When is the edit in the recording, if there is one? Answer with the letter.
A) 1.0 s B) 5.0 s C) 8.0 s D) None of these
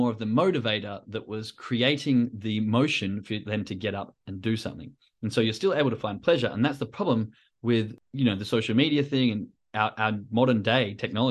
C